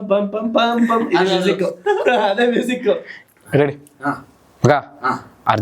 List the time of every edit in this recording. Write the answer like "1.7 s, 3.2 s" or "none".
3.1 s